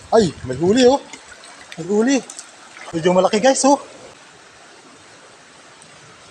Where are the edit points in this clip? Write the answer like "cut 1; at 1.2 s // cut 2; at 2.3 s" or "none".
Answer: cut 1; at 2.8 s // cut 2; at 4.2 s